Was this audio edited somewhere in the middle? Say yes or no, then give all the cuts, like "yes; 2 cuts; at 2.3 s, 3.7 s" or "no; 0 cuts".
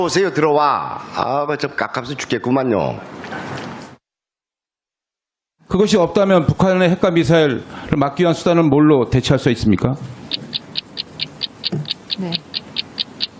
yes; 1 cut; at 8.1 s